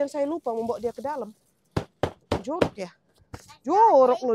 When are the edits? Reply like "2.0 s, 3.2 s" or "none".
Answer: none